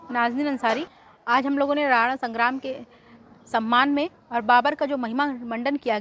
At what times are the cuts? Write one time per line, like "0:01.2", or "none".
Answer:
0:00.9